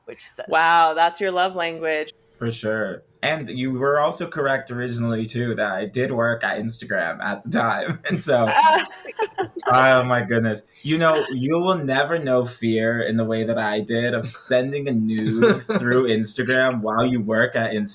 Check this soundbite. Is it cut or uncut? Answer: cut